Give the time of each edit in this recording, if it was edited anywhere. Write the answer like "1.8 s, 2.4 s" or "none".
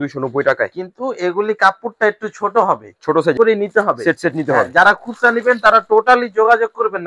3.4 s